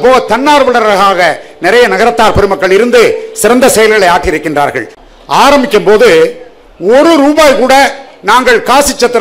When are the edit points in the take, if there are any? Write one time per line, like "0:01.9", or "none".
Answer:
0:05.0